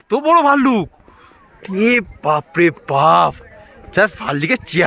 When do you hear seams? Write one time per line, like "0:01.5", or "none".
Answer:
none